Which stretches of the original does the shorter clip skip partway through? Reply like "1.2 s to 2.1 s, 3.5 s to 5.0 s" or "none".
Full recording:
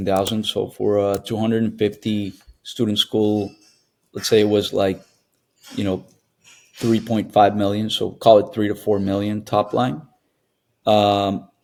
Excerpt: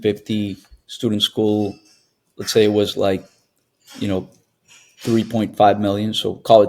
none

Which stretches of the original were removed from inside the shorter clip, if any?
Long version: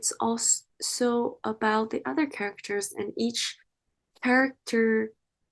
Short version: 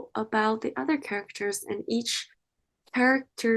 none

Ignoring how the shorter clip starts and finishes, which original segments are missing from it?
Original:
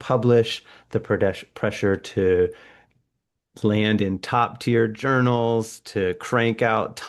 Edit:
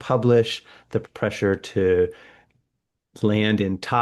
1.0 s to 1.4 s

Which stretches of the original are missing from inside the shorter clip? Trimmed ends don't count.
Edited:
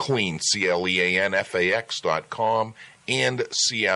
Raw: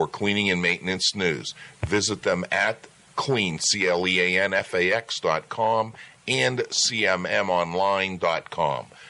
none

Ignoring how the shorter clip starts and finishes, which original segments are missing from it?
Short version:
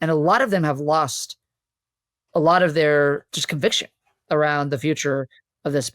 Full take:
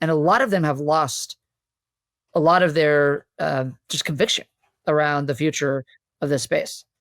3.3 s to 3.8 s

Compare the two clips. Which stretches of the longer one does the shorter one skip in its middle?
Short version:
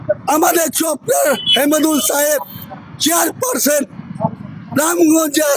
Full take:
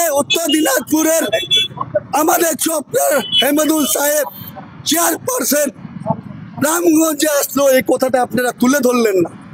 none

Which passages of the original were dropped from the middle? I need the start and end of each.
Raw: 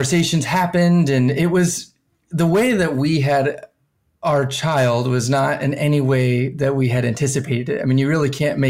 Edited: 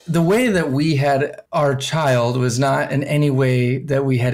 3.6 s to 4.1 s

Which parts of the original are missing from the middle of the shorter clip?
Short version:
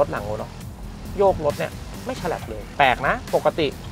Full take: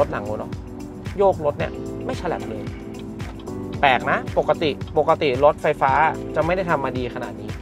2.7 s to 3.7 s

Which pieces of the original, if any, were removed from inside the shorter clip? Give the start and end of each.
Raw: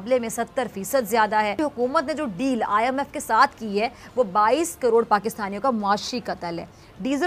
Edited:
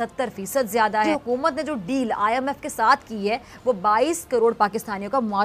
1.5 s to 1.6 s

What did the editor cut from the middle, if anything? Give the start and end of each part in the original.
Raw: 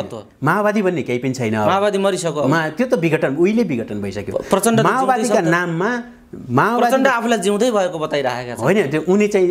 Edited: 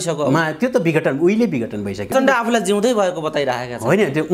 4.3 s to 6.9 s

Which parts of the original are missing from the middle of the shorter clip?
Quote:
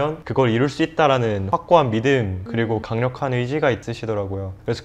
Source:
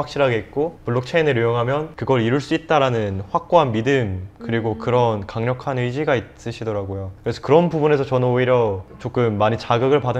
3.1 s to 3.2 s, 4.5 s to 5.1 s, 6.4 s to 6.5 s

